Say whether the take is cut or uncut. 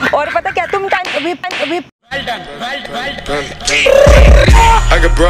uncut